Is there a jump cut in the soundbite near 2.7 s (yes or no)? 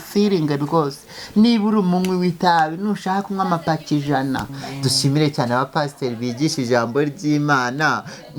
no